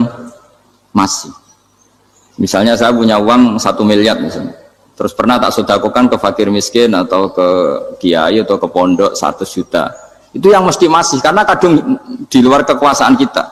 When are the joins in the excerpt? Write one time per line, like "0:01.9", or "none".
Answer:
none